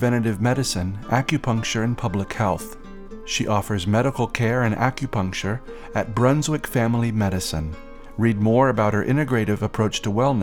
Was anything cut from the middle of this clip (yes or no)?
no